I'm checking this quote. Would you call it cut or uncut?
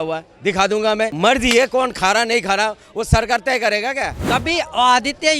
cut